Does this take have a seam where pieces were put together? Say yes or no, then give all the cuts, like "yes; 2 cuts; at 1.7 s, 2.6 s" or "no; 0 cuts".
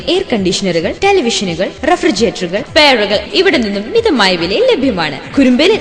yes; 1 cut; at 2.7 s